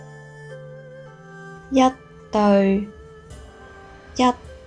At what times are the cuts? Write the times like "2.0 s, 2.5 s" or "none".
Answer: 1.6 s